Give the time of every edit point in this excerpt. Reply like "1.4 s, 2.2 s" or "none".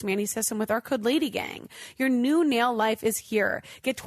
none